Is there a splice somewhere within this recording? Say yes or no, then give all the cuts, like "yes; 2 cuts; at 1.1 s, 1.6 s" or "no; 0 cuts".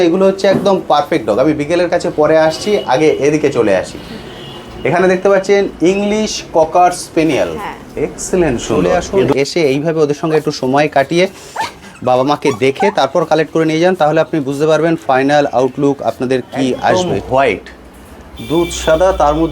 yes; 2 cuts; at 9.1 s, 16.9 s